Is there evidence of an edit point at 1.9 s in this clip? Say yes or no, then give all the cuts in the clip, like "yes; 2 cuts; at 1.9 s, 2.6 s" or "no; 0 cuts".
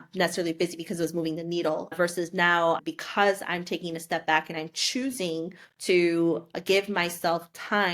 yes; 1 cut; at 1.9 s